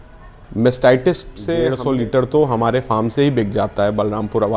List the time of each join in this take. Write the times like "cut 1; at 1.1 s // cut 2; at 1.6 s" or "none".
cut 1; at 1.7 s